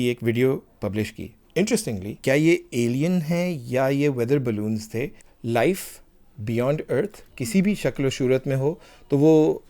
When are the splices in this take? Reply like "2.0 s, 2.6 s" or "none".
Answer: 2.2 s, 5.3 s